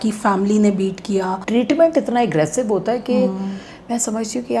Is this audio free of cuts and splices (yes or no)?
no